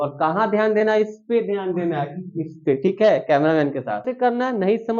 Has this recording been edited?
yes; 1 cut; at 4.1 s

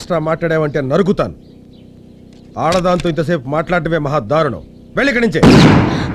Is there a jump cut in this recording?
no; 0 cuts

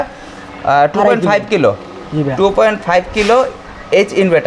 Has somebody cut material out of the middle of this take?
no; 0 cuts

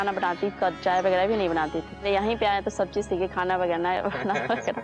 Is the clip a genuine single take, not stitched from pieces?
no; 1 cut; at 1.9 s

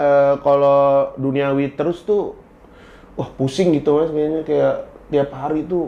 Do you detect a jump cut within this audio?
no; 0 cuts

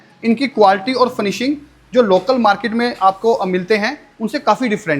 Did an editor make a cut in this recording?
no; 0 cuts

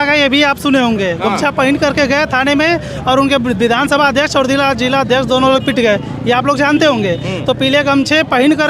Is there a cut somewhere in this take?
no; 0 cuts

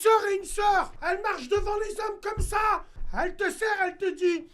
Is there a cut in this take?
yes; 2 cuts; at 0.9 s, 3.0 s

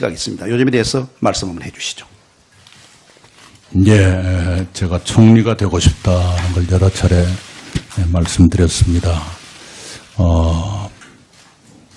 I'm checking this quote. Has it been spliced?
yes; 1 cut; at 8.5 s

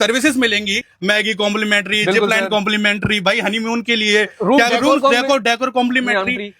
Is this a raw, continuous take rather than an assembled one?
no; 1 cut; at 0.9 s

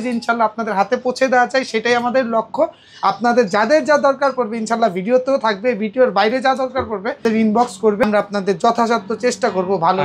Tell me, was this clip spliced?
no; 0 cuts

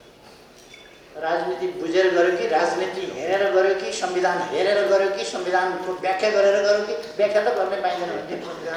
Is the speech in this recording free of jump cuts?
yes; 0 cuts

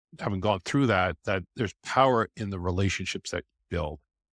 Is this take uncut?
yes; 0 cuts

